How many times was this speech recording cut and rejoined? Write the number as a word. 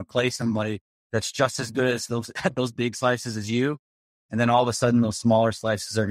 zero